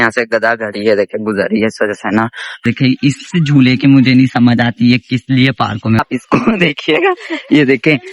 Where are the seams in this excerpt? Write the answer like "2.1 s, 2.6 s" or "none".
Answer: 2.6 s, 6.0 s